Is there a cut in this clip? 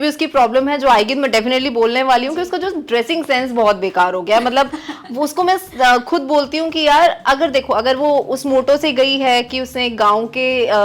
no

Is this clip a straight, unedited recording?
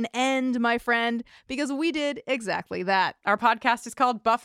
no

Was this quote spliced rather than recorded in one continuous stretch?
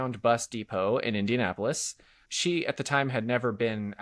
yes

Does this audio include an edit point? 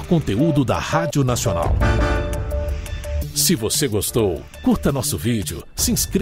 no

